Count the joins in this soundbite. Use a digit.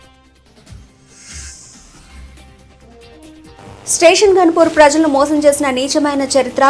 0